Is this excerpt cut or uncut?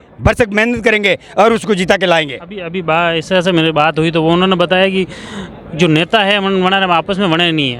uncut